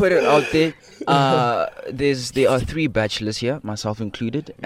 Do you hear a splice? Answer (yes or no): no